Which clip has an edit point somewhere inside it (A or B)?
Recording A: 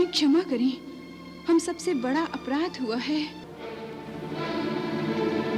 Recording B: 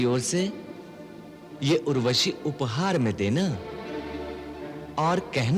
A